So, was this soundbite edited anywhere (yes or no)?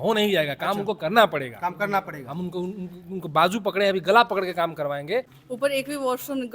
yes